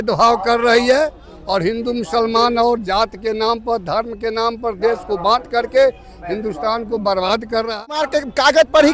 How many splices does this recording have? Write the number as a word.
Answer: one